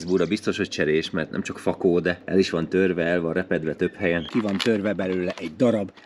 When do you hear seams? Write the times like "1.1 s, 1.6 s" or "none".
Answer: 2.2 s, 4.3 s